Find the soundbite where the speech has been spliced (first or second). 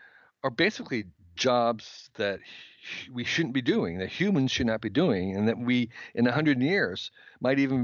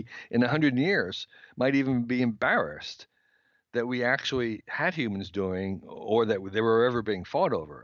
first